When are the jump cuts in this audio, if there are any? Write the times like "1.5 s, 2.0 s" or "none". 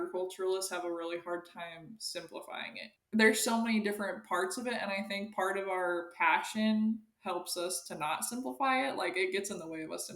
2.9 s

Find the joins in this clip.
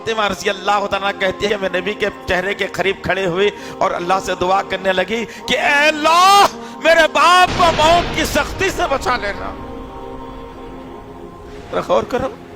1.5 s

